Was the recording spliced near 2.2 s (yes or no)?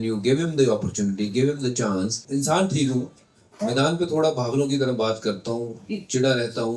yes